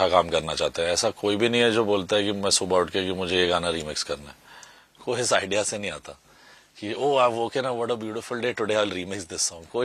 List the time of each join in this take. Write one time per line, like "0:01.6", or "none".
none

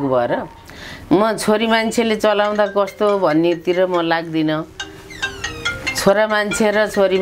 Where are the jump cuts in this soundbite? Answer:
none

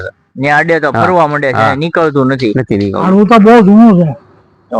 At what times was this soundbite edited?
0:03.0

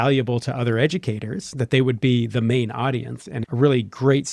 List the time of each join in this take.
0:03.4

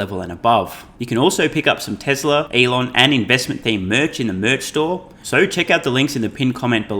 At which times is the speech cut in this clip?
0:00.9
0:02.5
0:05.2

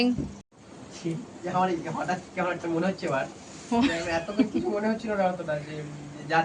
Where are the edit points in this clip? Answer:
0:00.9

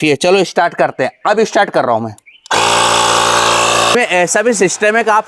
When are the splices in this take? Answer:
0:03.9

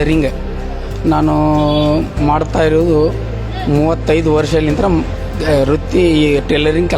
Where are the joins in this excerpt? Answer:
none

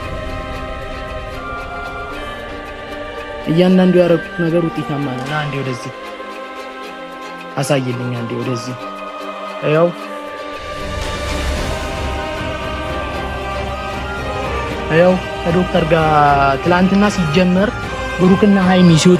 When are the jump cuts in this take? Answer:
none

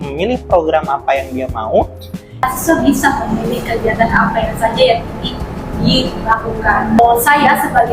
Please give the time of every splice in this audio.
0:02.4
0:07.0

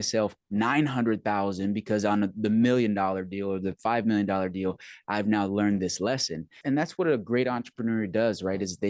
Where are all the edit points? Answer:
0:06.6

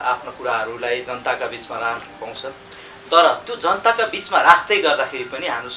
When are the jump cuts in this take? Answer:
none

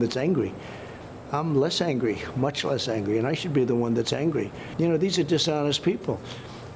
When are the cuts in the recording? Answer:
0:04.6

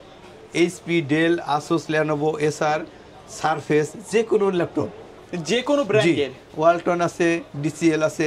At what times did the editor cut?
none

